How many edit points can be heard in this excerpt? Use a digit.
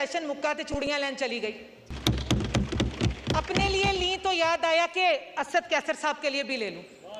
1